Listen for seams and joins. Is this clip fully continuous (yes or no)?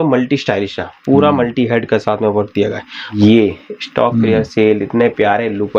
no